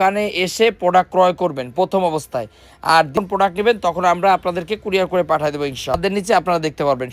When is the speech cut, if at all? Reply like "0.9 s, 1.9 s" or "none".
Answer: 3.2 s, 6.0 s